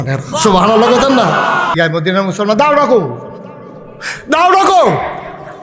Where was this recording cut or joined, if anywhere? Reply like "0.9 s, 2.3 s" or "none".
1.8 s